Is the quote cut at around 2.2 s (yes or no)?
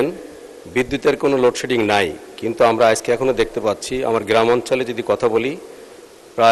no